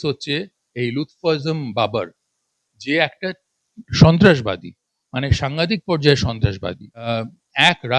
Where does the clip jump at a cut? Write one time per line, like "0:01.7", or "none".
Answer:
0:07.1